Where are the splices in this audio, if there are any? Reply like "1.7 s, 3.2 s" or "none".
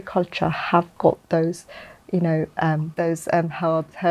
2.9 s

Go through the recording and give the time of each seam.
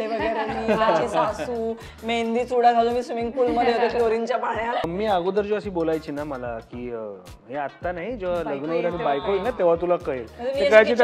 4.8 s

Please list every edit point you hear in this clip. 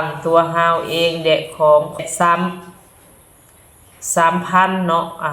2.0 s

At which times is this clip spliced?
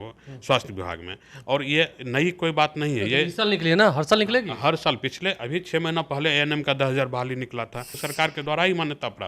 8.0 s

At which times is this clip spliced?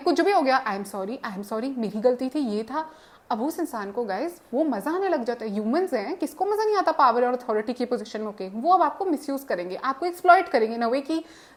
none

